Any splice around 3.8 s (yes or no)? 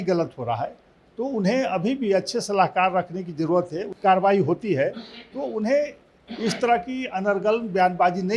yes